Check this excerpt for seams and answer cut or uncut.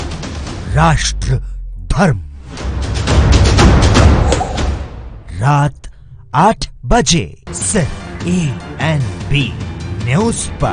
uncut